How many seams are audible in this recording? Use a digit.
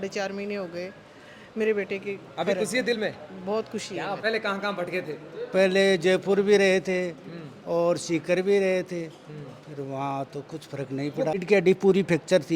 2